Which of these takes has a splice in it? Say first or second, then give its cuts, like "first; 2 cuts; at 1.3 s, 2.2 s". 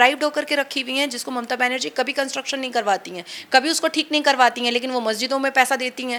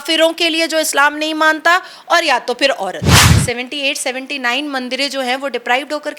second; 1 cut; at 3.3 s